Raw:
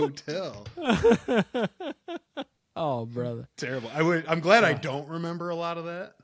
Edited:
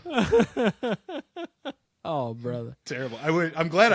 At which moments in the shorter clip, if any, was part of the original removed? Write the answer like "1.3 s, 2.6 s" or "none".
none